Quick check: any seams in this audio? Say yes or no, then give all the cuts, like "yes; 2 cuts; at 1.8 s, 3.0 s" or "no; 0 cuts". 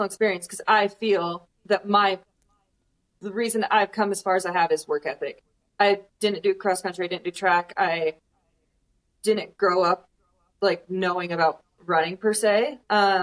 no; 0 cuts